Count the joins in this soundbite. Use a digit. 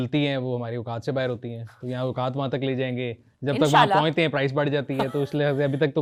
0